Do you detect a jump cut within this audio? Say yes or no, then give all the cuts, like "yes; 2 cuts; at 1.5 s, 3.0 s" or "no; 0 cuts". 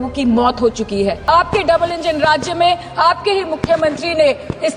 yes; 1 cut; at 1.2 s